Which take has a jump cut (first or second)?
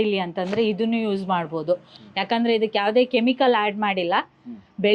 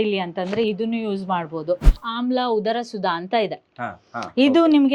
second